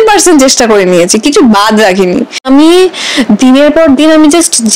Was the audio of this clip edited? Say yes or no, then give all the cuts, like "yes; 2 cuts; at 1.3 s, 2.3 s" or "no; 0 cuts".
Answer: yes; 1 cut; at 2.4 s